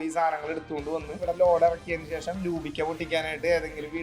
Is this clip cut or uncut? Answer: cut